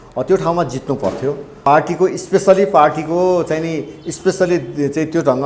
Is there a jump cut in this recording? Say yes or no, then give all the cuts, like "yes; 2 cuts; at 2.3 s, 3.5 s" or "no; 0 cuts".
yes; 1 cut; at 1.5 s